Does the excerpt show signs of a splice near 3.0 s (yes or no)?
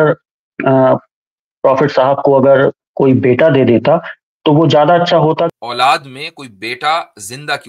no